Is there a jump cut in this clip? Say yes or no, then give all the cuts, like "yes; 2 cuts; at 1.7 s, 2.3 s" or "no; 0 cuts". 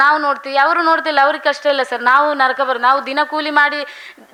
no; 0 cuts